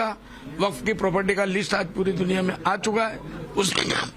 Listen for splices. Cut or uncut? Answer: uncut